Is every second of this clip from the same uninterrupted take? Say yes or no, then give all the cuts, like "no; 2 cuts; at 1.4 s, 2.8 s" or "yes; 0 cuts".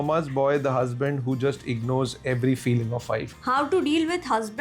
no; 1 cut; at 3.3 s